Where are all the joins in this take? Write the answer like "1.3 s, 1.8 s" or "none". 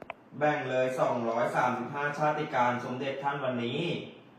none